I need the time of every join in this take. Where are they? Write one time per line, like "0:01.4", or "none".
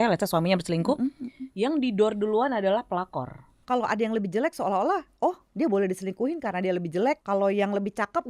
0:03.5
0:07.2